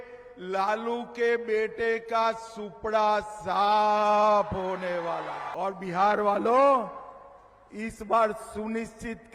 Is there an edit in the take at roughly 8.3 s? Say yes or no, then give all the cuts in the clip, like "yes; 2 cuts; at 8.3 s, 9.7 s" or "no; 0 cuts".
no; 1 cut; at 5.4 s